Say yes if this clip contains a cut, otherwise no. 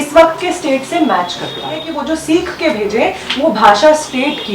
yes